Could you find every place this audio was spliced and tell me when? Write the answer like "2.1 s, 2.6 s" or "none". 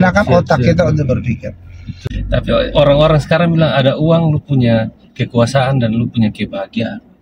2.0 s